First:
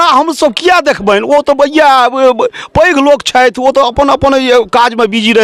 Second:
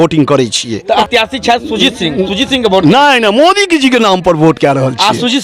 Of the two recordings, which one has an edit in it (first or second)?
second